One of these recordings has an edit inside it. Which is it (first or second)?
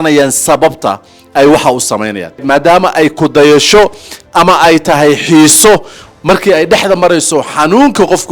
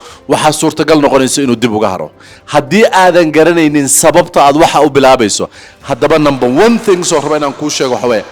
first